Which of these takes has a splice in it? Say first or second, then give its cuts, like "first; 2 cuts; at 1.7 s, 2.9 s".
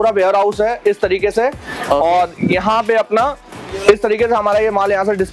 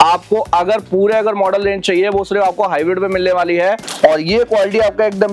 second; 1 cut; at 3.9 s